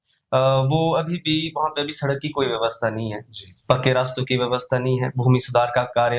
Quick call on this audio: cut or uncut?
uncut